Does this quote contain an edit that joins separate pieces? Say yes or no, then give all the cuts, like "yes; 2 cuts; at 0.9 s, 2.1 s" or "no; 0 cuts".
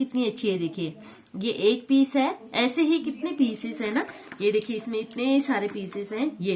no; 0 cuts